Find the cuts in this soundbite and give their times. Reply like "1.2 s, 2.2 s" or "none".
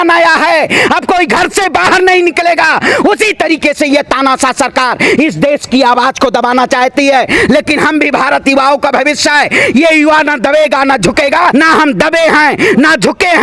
11.5 s